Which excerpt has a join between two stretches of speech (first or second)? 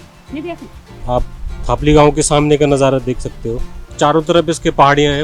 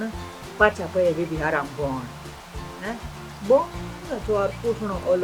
first